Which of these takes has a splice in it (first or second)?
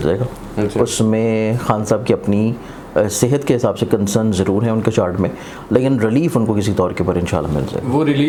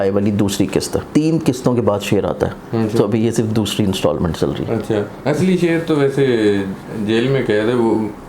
second